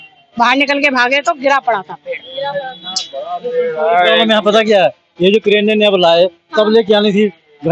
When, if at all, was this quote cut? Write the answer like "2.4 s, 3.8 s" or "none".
none